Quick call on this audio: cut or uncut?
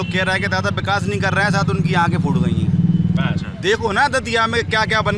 uncut